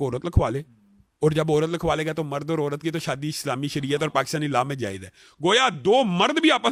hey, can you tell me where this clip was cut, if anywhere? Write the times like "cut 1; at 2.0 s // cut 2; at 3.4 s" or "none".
none